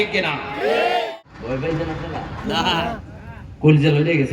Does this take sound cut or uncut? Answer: cut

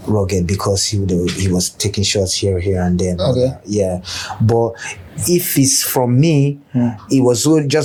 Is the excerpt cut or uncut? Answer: uncut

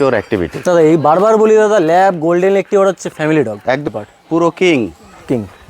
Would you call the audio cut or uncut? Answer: cut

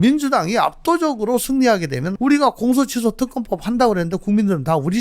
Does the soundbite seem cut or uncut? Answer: cut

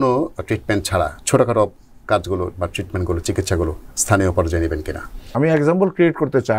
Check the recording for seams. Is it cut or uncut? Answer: cut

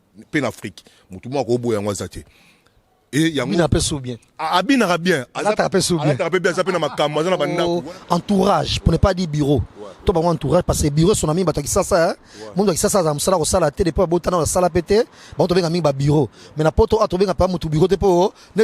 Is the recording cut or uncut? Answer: cut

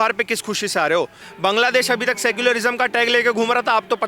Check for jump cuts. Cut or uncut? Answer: cut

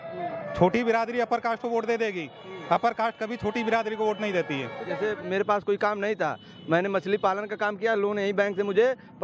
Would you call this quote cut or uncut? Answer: cut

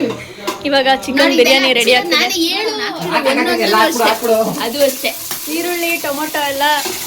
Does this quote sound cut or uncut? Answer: cut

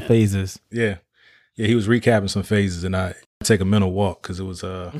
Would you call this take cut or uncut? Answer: cut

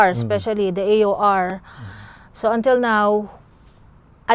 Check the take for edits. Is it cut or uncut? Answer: uncut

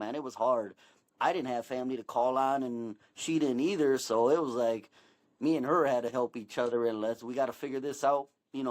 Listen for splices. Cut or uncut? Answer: cut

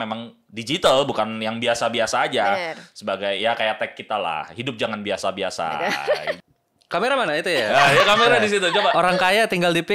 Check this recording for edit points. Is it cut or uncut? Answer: cut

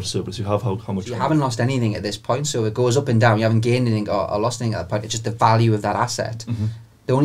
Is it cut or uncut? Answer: cut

